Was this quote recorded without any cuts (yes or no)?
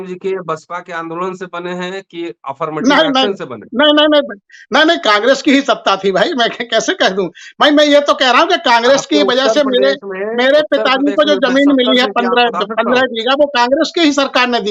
yes